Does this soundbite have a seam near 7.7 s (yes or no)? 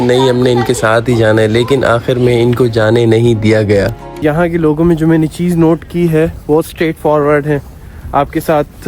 no